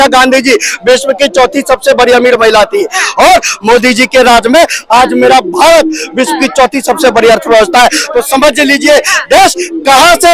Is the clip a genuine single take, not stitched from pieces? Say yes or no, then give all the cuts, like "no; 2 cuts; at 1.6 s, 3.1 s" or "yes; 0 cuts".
yes; 0 cuts